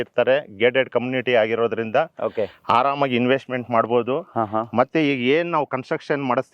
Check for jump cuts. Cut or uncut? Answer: uncut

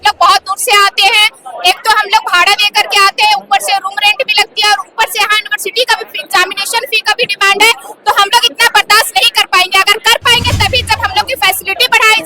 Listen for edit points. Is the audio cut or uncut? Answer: uncut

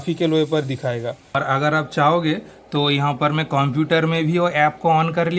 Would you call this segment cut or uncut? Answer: cut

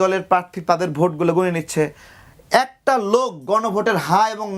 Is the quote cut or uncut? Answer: uncut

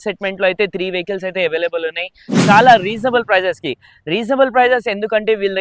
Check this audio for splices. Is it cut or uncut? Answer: cut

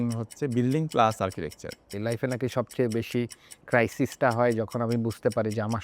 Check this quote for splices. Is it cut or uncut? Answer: cut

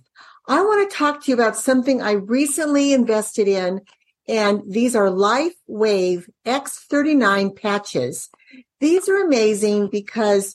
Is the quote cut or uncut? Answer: uncut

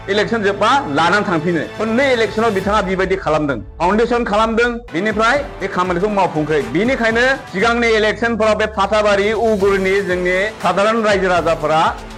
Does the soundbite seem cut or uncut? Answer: uncut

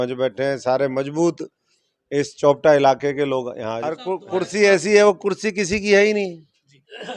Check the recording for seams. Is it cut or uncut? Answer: cut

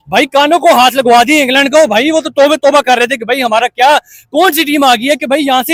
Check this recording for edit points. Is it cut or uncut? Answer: uncut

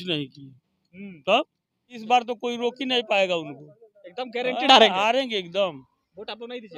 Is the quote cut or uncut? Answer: cut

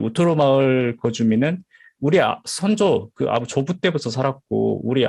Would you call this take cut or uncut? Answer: uncut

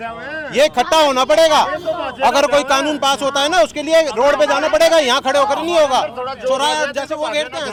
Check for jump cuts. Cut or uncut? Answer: uncut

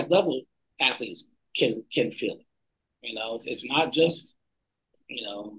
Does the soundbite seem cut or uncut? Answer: uncut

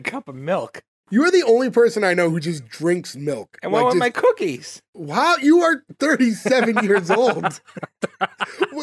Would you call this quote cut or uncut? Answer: cut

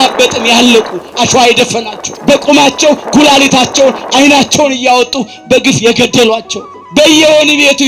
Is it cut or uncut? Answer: uncut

